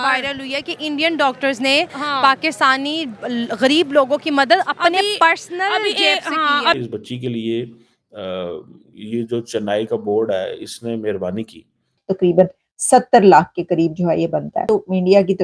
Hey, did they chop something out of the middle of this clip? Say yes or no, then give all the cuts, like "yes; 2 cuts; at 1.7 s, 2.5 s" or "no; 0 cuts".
yes; 2 cuts; at 6.8 s, 12.0 s